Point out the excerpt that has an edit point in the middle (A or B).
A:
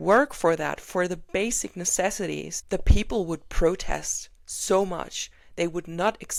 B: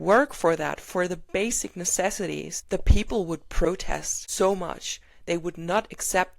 B